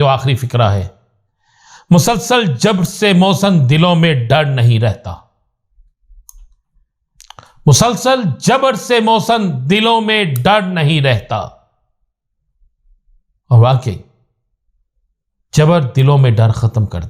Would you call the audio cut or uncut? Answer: uncut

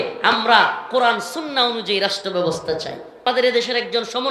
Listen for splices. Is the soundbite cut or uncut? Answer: cut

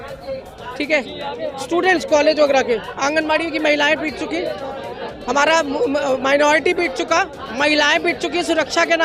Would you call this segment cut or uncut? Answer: uncut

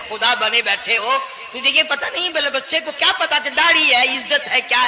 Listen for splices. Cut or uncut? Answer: uncut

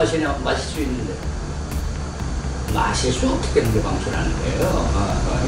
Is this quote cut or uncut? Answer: uncut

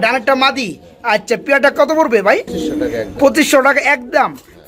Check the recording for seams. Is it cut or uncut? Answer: uncut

